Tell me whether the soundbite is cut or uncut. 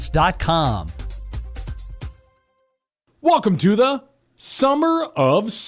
cut